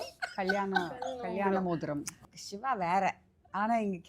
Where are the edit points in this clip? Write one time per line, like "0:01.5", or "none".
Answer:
0:02.1